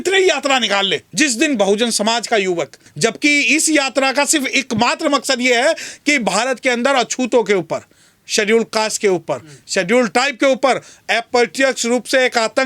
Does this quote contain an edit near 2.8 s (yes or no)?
yes